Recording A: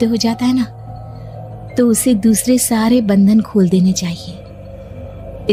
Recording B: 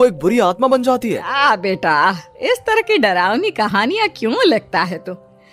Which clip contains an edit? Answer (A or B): B